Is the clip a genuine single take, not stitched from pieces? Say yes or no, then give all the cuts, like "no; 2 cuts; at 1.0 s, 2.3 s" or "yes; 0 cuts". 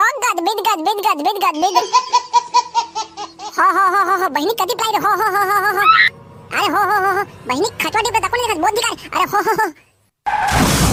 yes; 0 cuts